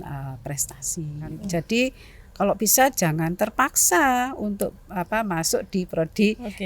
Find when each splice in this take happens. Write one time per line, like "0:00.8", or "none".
0:01.4